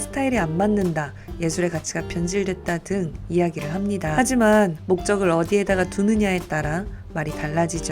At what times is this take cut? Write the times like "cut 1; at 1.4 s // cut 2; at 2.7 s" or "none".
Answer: cut 1; at 4.1 s